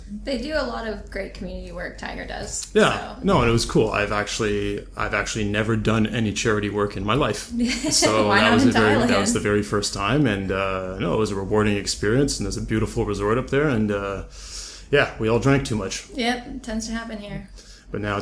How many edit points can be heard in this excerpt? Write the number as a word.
one